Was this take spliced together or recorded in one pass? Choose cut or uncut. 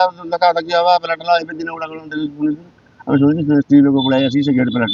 uncut